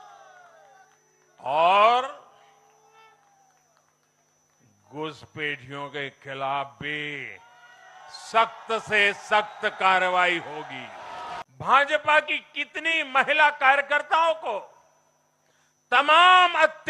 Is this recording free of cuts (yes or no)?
no